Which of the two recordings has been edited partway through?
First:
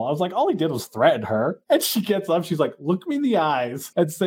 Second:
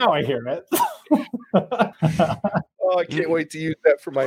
second; 1 cut; at 1.9 s

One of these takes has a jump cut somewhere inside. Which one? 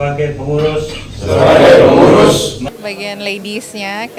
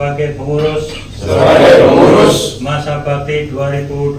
first; 1 cut; at 2.7 s

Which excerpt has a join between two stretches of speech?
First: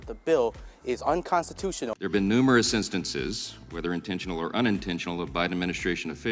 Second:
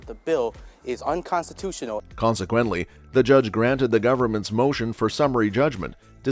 first; 1 cut; at 1.9 s

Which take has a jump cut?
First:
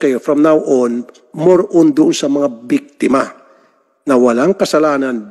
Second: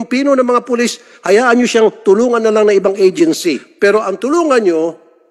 second; 1 cut; at 3.7 s

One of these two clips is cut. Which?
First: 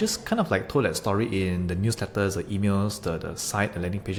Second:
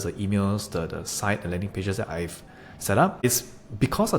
second; 1 cut; at 3.2 s

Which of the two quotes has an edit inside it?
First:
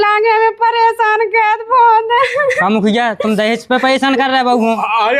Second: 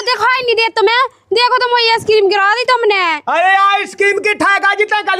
second; 1 cut; at 3.2 s

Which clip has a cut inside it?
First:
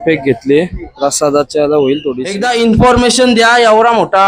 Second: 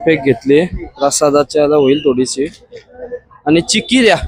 first; 1 cut; at 2.3 s

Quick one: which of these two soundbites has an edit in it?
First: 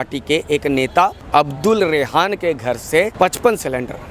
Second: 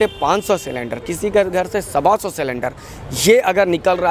first; 2 cuts; at 1.2 s, 3.1 s

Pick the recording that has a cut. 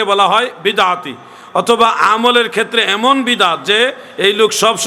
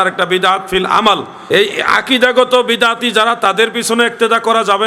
second; 1 cut; at 1.3 s

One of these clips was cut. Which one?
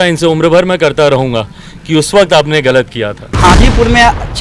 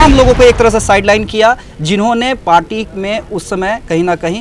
first; 1 cut; at 3.3 s

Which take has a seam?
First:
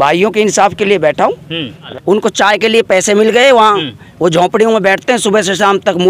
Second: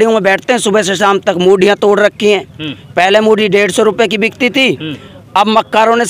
first; 1 cut; at 1.8 s

